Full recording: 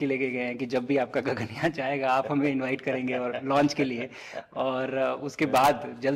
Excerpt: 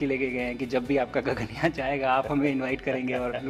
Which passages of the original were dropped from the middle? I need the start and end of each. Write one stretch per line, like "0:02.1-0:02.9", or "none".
none